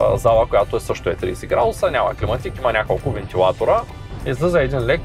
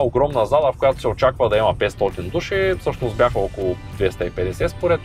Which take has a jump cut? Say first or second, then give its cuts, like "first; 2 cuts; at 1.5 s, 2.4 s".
first; 1 cut; at 3.9 s